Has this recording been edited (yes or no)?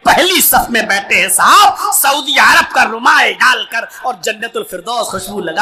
no